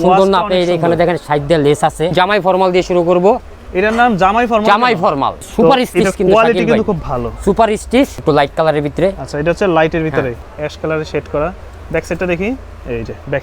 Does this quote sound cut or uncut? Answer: cut